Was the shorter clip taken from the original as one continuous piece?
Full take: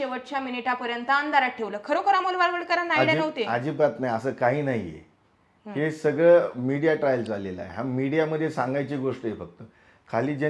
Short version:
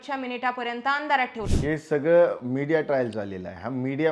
no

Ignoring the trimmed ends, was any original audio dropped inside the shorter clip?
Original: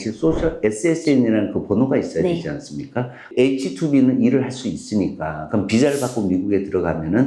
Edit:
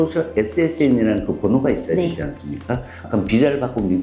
yes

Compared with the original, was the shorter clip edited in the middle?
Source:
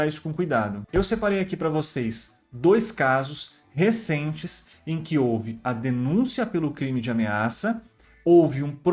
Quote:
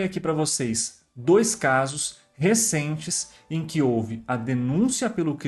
no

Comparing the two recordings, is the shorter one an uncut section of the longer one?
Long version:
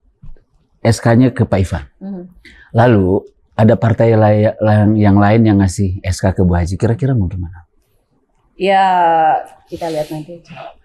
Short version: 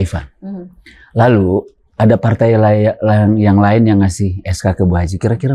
yes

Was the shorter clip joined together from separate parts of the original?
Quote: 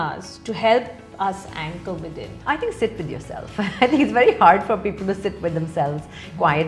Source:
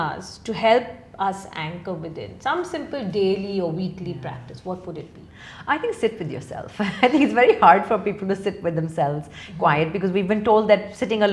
yes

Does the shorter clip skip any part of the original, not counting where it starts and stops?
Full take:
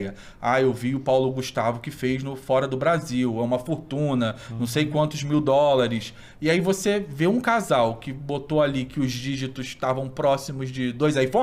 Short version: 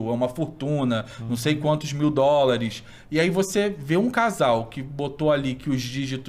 no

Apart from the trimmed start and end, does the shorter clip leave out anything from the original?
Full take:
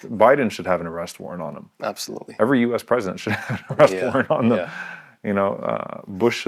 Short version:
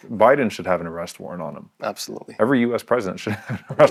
no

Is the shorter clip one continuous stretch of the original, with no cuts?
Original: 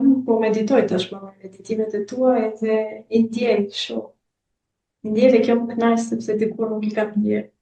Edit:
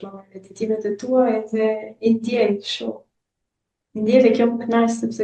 yes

